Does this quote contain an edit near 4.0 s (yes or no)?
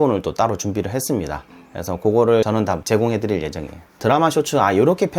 yes